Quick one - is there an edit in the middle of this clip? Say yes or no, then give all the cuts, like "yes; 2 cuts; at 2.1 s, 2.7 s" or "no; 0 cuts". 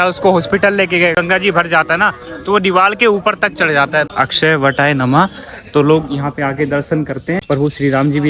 yes; 3 cuts; at 1.1 s, 4.1 s, 7.4 s